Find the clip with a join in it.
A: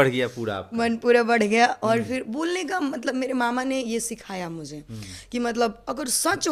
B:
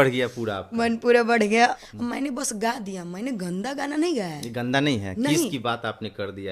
B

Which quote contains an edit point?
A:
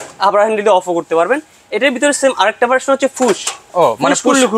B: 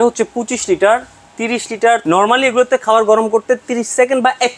B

